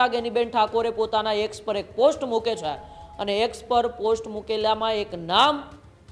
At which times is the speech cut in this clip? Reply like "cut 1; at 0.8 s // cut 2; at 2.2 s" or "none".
none